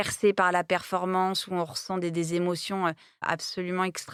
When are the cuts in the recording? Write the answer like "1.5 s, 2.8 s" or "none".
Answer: none